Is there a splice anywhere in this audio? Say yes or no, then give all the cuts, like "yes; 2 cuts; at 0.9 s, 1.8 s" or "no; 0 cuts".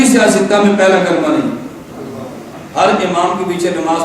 yes; 1 cut; at 2.6 s